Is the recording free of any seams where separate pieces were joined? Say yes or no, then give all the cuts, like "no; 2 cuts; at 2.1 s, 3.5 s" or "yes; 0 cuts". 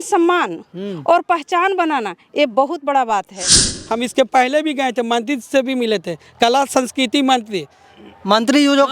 no; 1 cut; at 3.8 s